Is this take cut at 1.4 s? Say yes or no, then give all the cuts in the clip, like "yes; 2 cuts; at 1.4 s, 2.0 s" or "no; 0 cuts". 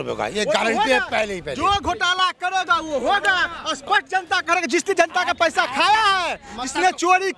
no; 0 cuts